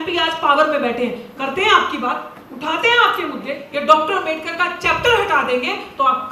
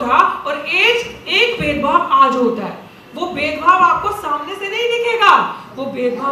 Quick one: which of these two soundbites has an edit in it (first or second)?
first